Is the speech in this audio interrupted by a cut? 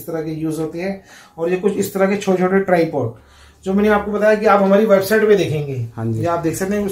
no; 0 cuts

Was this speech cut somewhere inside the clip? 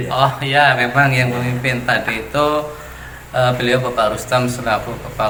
no; 0 cuts

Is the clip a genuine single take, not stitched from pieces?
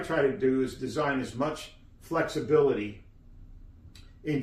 yes; 0 cuts

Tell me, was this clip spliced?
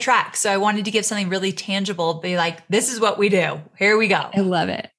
no; 0 cuts

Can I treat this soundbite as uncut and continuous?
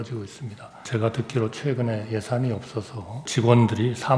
no; 2 cuts; at 0.8 s, 3.3 s

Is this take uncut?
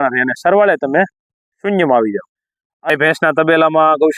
no; 1 cut; at 2.9 s

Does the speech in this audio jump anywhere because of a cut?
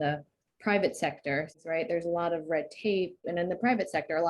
yes; 2 cuts; at 1.5 s, 3.2 s

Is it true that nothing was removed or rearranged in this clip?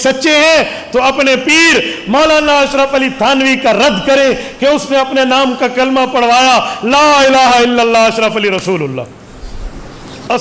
yes; 0 cuts

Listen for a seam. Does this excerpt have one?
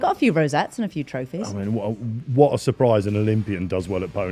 no; 0 cuts

